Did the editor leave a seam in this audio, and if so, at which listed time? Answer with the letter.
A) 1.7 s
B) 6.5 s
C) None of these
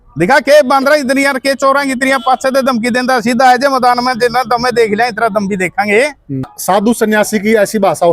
B